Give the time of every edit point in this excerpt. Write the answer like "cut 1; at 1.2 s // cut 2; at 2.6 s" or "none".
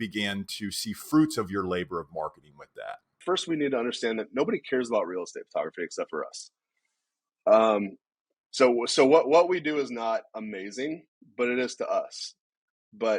cut 1; at 3.1 s